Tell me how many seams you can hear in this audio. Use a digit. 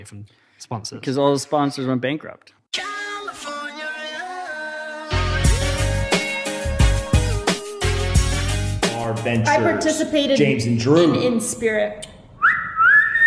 1